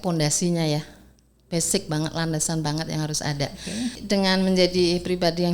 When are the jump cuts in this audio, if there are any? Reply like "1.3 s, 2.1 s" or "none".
4.0 s